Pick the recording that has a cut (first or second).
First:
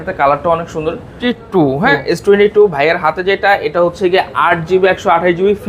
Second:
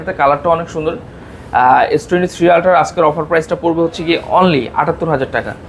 first